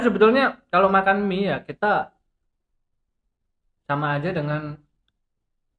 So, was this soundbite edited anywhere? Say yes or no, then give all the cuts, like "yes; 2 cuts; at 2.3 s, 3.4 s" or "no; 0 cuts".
no; 0 cuts